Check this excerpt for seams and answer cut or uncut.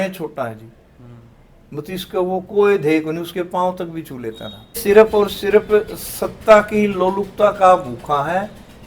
cut